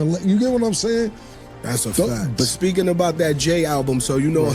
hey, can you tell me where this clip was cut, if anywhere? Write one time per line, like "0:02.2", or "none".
0:02.3

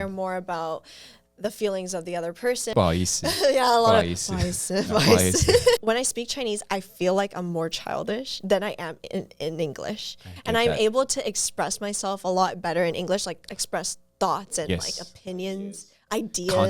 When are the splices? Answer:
0:02.7
0:05.8

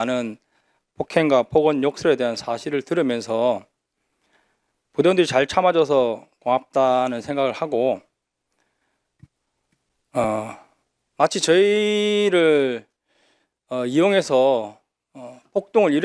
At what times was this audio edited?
none

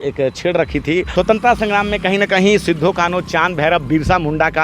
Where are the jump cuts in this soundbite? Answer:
0:01.1

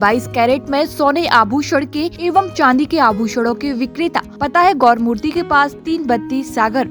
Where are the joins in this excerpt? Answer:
0:02.1
0:04.3

